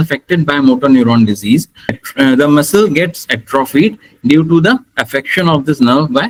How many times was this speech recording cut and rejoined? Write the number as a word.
zero